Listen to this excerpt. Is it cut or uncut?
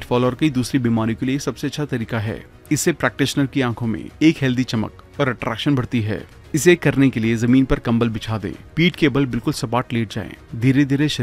uncut